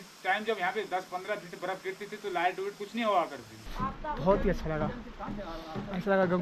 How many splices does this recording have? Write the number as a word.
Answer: one